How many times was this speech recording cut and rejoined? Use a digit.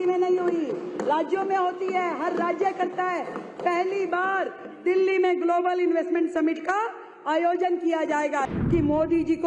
1